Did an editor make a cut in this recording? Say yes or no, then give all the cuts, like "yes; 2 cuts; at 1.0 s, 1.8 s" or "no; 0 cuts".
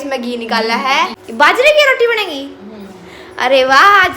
yes; 1 cut; at 1.2 s